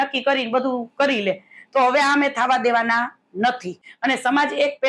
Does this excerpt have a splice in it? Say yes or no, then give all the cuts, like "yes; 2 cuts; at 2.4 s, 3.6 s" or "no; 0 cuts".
yes; 1 cut; at 3.8 s